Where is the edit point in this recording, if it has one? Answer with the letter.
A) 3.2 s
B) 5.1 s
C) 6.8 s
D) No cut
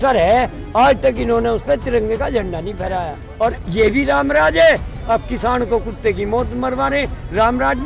A